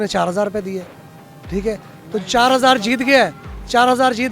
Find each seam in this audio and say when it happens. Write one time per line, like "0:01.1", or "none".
none